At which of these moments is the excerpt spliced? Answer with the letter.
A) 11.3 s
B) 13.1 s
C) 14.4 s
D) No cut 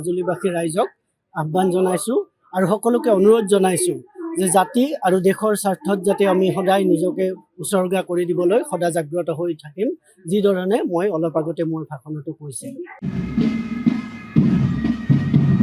B